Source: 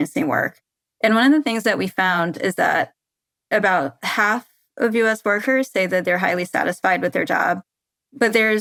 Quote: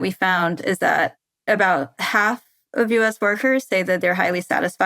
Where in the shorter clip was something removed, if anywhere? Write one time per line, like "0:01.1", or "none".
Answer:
0:01.3